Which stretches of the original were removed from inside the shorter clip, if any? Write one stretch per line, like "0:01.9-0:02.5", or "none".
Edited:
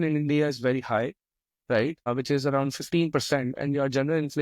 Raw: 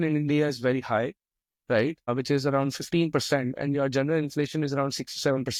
none